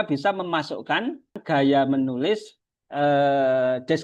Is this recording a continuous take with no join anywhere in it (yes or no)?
no